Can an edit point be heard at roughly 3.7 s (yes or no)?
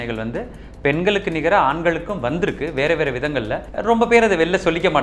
yes